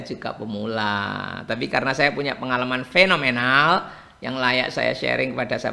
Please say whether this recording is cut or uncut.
uncut